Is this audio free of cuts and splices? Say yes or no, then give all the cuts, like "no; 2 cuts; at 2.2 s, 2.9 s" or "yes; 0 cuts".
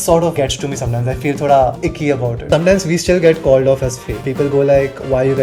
no; 2 cuts; at 2.4 s, 4.1 s